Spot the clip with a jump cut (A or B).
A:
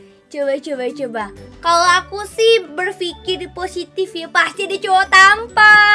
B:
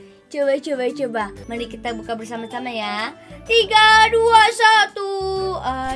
B